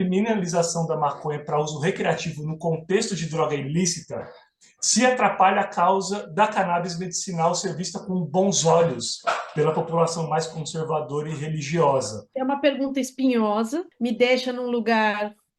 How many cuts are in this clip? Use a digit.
2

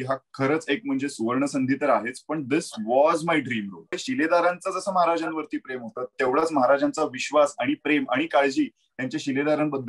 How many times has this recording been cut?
1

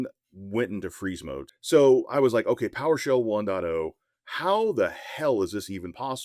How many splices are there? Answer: 1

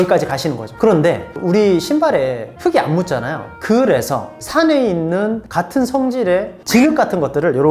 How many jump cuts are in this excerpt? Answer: 1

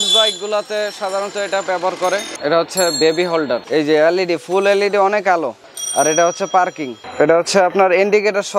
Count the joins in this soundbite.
2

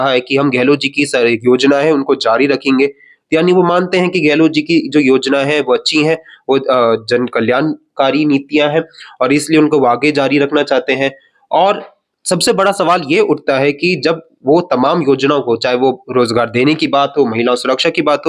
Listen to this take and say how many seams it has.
0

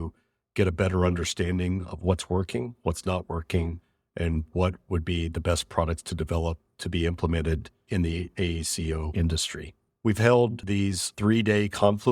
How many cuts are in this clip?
2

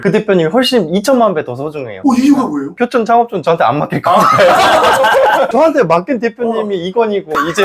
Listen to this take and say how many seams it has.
1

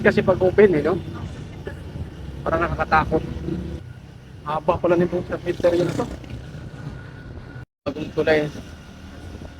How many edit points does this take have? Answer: 1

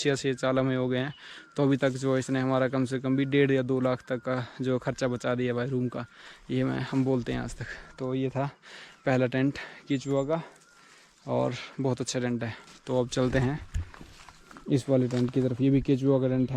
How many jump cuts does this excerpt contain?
0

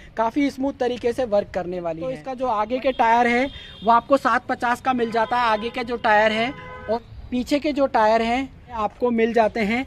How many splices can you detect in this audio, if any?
3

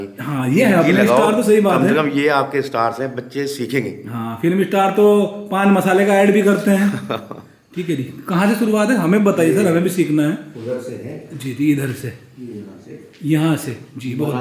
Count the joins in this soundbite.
0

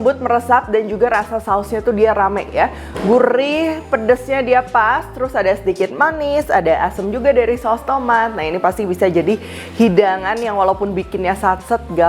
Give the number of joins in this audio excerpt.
0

